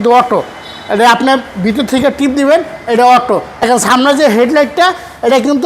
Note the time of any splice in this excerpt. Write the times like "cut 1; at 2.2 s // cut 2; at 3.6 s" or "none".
cut 1; at 3.7 s